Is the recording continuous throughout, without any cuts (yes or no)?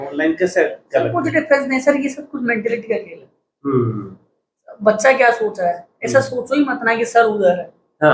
yes